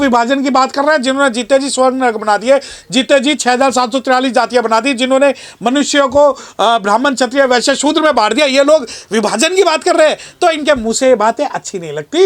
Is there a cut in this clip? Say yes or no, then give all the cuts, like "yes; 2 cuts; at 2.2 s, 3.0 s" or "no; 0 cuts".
no; 0 cuts